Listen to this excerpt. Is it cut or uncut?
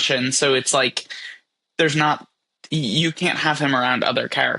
uncut